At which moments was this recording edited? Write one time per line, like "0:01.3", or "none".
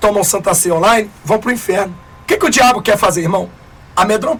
none

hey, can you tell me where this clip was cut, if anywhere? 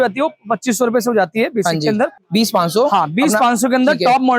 0:02.2

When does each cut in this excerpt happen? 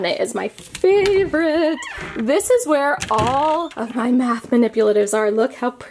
none

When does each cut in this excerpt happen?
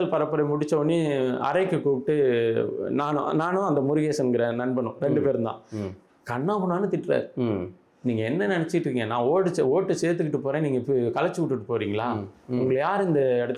none

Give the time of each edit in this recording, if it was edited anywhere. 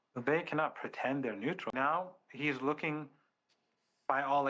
0:01.7

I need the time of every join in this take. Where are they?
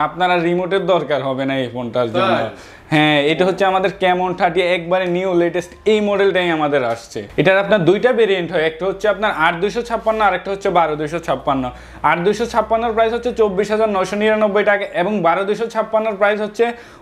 none

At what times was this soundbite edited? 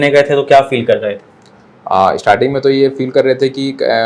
none

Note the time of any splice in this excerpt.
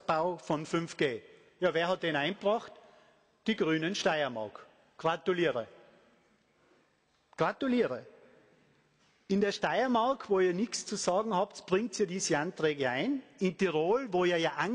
none

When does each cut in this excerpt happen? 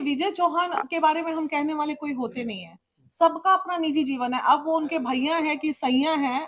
none

